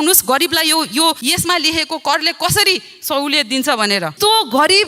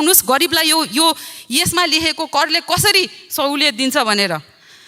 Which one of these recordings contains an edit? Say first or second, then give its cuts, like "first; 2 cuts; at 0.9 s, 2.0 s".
first; 2 cuts; at 1.2 s, 4.1 s